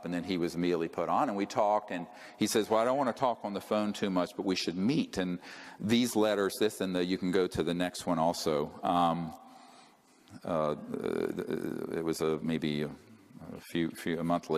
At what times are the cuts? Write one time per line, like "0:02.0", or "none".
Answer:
0:05.5

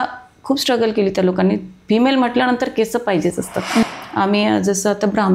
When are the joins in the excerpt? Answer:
0:03.8

